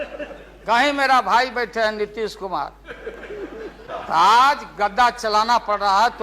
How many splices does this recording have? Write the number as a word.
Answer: one